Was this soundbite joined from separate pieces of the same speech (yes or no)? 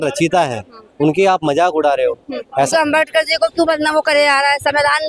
yes